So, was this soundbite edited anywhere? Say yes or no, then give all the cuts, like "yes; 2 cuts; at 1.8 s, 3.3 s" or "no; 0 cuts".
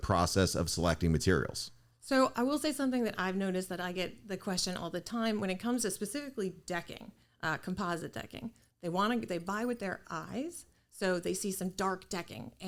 no; 0 cuts